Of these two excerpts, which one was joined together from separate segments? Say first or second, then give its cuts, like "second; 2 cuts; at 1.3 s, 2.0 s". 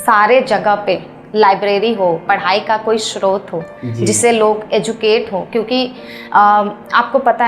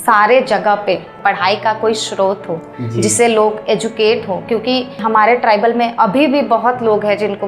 second; 2 cuts; at 1.2 s, 5.0 s